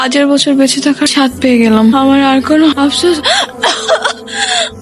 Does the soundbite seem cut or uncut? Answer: uncut